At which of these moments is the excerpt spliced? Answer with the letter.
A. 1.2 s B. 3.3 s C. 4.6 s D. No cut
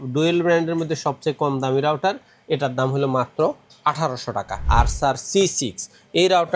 C